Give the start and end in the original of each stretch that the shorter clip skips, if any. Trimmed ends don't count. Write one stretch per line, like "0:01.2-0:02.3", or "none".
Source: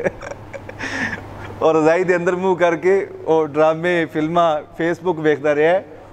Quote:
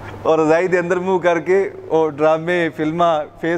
none